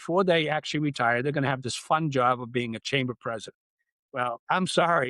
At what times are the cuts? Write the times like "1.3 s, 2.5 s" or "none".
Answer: 4.2 s